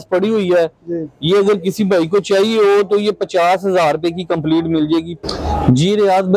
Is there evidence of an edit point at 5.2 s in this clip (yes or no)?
yes